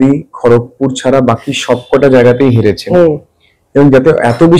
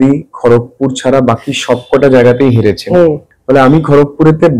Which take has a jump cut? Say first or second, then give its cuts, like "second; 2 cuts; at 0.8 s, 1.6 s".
second; 1 cut; at 3.3 s